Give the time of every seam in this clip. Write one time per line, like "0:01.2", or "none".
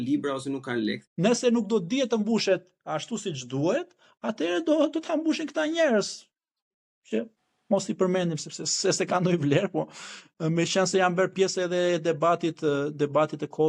0:01.1